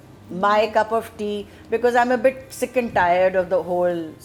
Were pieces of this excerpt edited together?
no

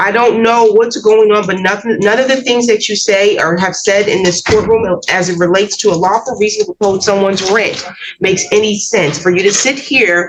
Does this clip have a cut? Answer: no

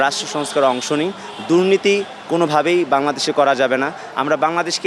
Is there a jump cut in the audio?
no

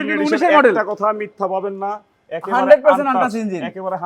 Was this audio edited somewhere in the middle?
no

